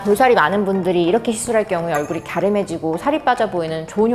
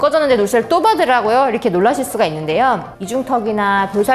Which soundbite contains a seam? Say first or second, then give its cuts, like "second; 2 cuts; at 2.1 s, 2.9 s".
second; 1 cut; at 2.9 s